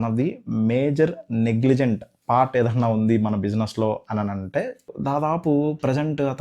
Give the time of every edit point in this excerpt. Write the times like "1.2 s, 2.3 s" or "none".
4.9 s